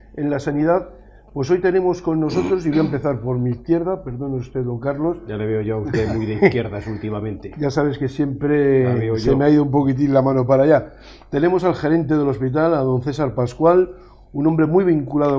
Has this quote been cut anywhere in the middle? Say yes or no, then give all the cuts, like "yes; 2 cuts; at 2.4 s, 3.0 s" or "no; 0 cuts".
no; 0 cuts